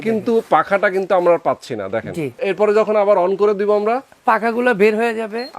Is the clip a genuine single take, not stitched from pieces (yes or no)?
no